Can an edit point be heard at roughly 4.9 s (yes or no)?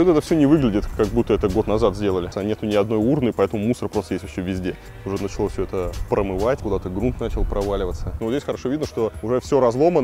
yes